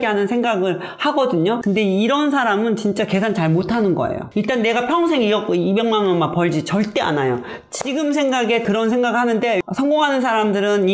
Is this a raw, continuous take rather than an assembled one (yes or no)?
yes